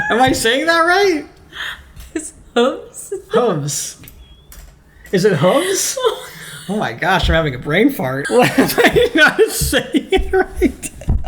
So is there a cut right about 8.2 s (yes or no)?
yes